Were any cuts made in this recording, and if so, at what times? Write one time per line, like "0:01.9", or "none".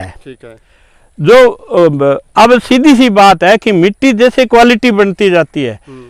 none